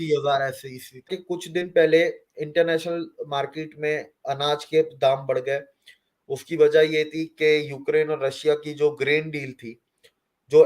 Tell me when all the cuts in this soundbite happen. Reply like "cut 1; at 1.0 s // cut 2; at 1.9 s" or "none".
cut 1; at 1.2 s